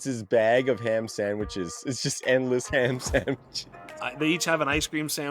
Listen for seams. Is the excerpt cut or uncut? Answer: cut